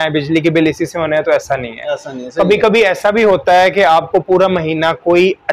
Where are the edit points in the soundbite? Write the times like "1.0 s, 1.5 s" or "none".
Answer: none